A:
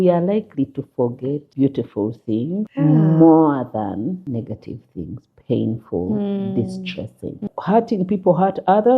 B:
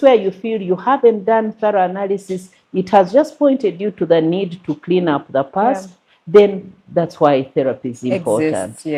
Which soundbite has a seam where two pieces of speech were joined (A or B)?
A